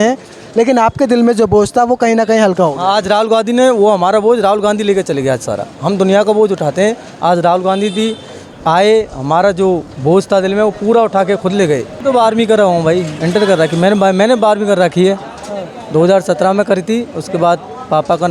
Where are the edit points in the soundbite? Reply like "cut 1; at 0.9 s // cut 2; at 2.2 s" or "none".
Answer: cut 1; at 11.9 s